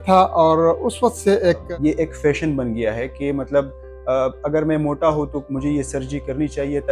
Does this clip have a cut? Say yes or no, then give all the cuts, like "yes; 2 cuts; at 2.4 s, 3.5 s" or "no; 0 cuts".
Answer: yes; 1 cut; at 1.6 s